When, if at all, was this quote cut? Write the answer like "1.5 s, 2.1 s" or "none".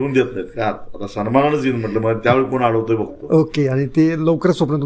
none